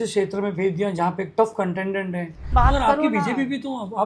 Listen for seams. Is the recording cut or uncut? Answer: cut